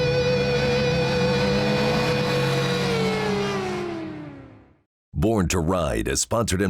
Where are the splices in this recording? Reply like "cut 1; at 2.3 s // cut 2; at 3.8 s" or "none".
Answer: cut 1; at 5.0 s